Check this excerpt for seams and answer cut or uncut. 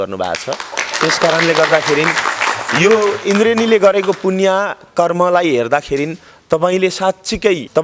uncut